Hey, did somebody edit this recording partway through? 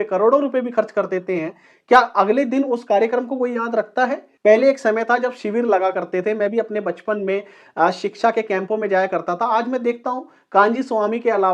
yes; 1 cut; at 4.3 s

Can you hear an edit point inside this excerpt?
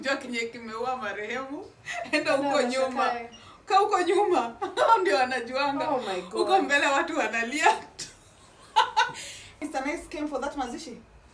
yes; 1 cut; at 9.6 s

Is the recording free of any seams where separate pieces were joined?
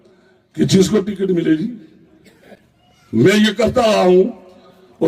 yes; 0 cuts

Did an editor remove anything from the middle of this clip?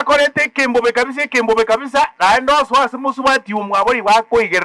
no; 0 cuts

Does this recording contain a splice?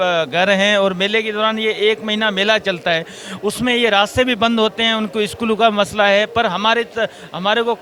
no; 0 cuts

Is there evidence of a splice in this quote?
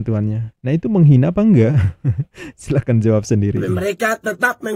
yes; 1 cut; at 3.6 s

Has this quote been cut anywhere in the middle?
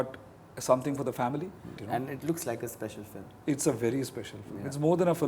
yes; 1 cut; at 1.8 s

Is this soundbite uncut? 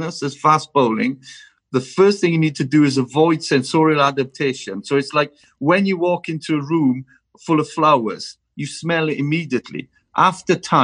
yes; 0 cuts

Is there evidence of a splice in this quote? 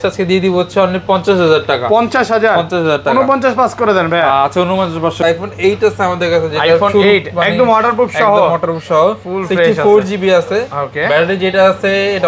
yes; 1 cut; at 5.2 s

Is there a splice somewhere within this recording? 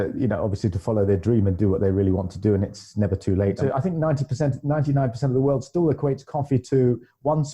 yes; 1 cut; at 3.6 s

